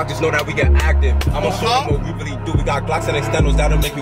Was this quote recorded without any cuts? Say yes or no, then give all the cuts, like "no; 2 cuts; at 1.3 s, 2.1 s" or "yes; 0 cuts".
yes; 0 cuts